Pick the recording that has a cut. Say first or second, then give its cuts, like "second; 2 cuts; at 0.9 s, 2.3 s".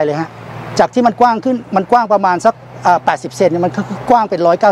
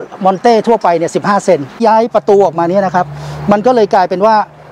second; 1 cut; at 1.8 s